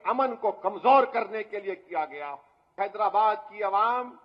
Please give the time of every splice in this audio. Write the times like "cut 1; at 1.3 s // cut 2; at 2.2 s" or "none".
cut 1; at 2.7 s